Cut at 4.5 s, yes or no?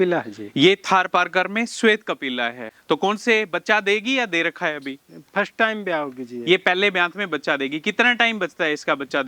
no